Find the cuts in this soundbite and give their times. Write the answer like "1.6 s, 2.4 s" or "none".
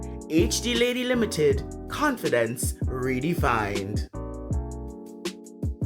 3.8 s